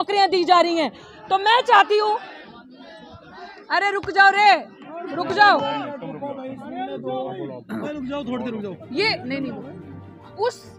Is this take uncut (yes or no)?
yes